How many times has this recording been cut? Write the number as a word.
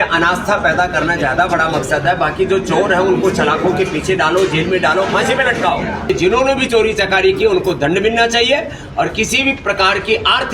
one